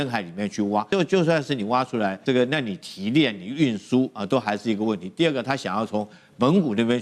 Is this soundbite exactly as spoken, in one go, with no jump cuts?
no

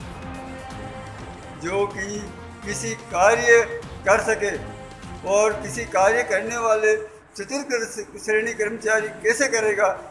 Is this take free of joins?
no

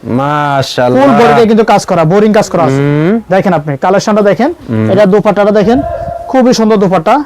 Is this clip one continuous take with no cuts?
yes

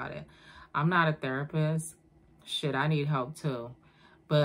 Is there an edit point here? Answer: no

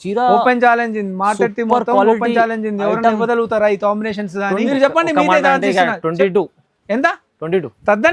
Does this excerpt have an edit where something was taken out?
yes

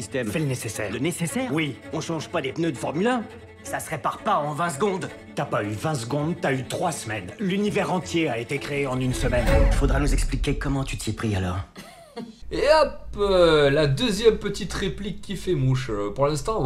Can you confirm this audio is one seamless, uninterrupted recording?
yes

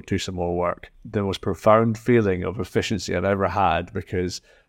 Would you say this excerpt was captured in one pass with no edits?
no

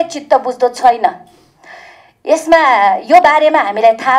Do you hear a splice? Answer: no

